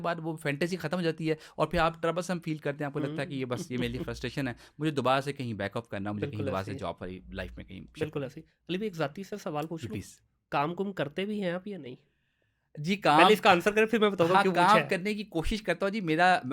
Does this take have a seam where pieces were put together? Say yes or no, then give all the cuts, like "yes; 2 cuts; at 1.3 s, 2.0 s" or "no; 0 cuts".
no; 0 cuts